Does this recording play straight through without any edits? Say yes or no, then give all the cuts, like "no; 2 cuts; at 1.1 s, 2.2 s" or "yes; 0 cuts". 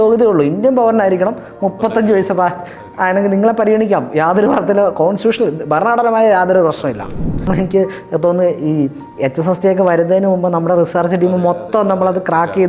no; 1 cut; at 7.5 s